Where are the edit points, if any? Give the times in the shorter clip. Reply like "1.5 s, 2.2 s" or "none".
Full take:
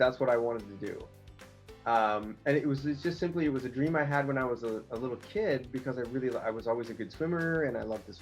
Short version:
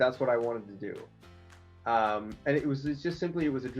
none